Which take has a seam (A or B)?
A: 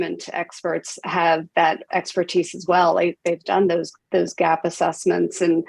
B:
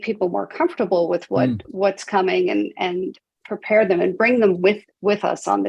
A